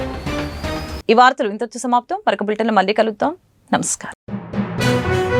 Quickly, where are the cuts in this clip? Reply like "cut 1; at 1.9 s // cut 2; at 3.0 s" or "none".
none